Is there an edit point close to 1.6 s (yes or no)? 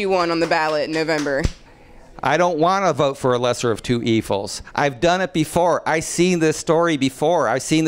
yes